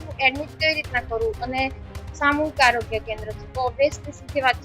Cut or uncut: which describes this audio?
uncut